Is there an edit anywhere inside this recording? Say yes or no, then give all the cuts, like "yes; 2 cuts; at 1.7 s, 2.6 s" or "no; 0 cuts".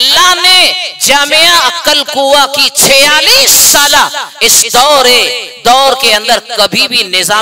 no; 0 cuts